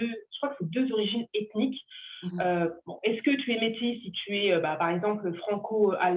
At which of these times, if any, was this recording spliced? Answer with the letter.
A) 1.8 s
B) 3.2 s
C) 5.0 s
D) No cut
D